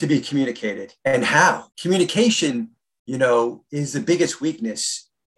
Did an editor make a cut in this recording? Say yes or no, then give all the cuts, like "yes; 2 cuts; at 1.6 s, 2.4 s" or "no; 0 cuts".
yes; 2 cuts; at 0.9 s, 1.7 s